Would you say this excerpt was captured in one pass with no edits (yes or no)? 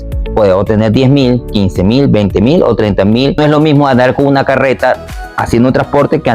no